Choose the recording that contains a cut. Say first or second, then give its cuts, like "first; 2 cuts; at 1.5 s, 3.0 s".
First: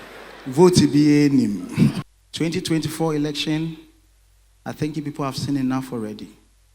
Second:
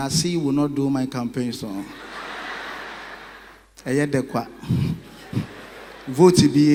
first; 1 cut; at 2.1 s